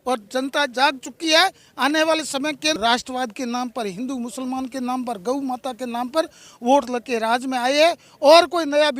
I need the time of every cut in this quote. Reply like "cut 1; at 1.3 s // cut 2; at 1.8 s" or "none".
cut 1; at 2.8 s

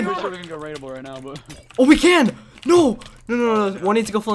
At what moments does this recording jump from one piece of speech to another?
none

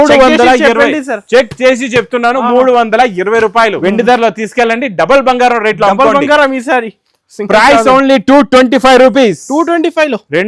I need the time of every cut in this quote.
cut 1; at 3.8 s

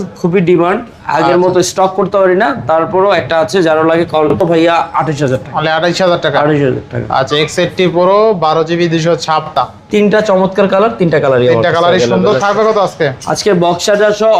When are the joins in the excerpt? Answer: cut 1; at 4.4 s // cut 2; at 9.5 s

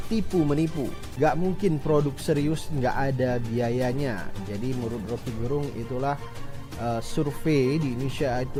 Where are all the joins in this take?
none

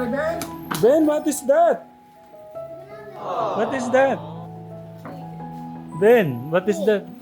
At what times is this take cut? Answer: cut 1; at 1.8 s // cut 2; at 3.5 s

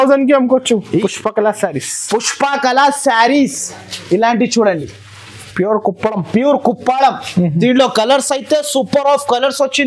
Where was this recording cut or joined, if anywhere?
cut 1; at 0.9 s

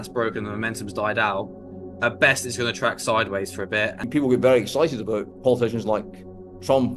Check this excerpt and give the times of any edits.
cut 1; at 4.0 s

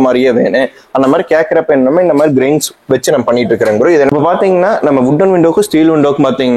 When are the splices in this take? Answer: cut 1; at 4.1 s

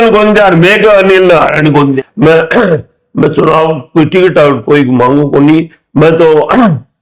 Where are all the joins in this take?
cut 1; at 1.8 s

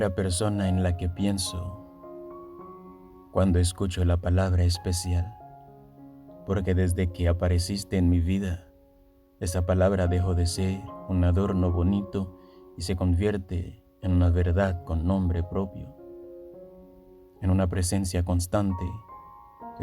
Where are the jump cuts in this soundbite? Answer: cut 1; at 1.6 s // cut 2; at 3.3 s

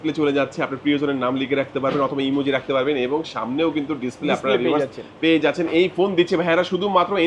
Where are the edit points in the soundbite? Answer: none

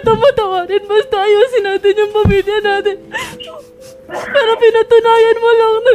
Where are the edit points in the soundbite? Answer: none

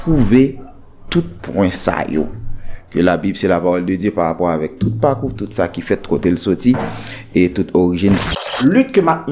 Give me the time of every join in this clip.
cut 1; at 8.3 s

